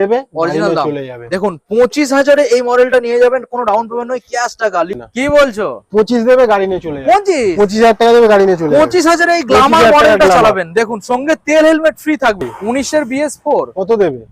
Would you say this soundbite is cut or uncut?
cut